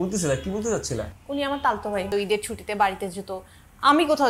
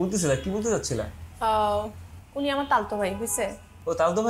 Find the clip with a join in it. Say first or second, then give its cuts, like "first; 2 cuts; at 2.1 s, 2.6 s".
first; 2 cuts; at 1.2 s, 2.1 s